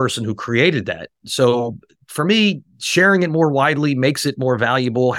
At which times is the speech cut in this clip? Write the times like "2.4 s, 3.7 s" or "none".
1.2 s